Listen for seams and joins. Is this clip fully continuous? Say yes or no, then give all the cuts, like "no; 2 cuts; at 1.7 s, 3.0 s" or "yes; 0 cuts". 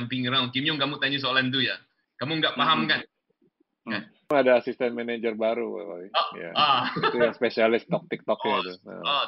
no; 1 cut; at 4.3 s